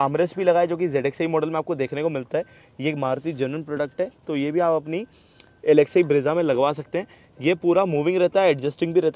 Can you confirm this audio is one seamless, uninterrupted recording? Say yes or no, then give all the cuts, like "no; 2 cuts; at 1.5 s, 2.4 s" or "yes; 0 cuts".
yes; 0 cuts